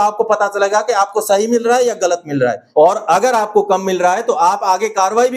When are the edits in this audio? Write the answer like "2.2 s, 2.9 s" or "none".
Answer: 2.6 s